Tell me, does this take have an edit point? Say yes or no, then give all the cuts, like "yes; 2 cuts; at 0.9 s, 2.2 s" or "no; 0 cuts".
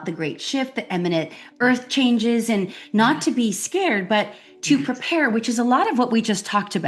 no; 0 cuts